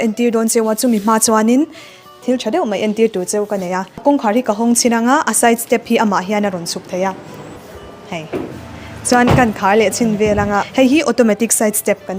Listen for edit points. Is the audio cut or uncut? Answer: cut